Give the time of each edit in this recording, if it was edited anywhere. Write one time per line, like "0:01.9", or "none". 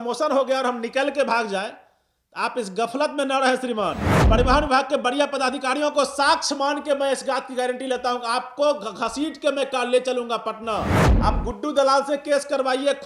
0:04.1
0:11.0